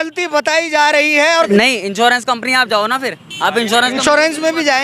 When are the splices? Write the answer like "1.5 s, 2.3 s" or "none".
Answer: 1.5 s